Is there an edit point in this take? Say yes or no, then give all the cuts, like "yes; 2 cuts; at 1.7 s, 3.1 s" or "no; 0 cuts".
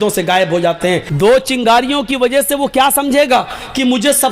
yes; 1 cut; at 1.1 s